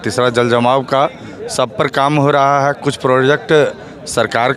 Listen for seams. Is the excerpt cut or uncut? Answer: uncut